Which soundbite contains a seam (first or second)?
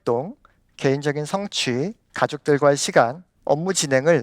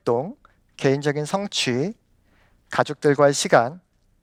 first